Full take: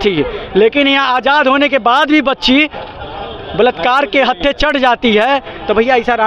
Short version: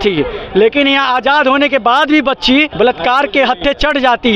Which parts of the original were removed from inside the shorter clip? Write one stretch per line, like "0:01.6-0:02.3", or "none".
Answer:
0:02.7-0:03.5